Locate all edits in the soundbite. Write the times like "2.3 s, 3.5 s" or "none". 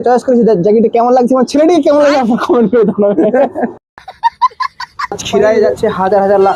3.8 s, 5.2 s